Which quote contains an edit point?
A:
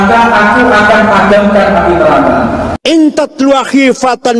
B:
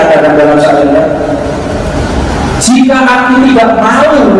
A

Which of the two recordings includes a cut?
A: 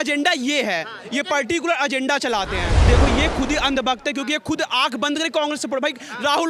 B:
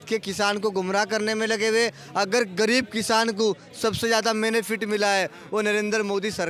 A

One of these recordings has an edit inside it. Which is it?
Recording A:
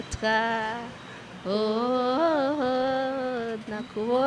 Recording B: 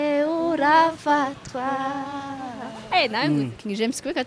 B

